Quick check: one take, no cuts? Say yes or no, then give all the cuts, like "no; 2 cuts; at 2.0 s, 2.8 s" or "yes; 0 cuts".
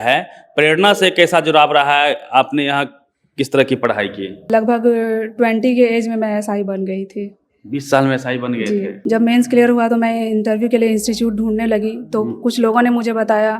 no; 2 cuts; at 4.4 s, 8.9 s